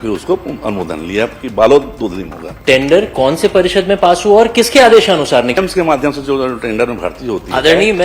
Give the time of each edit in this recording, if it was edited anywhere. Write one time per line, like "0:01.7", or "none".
0:02.5
0:05.6